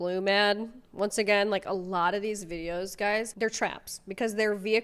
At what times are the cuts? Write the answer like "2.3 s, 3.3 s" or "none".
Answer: none